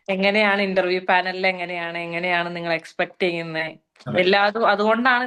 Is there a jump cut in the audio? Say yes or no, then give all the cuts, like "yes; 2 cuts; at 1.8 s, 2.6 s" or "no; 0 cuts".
no; 0 cuts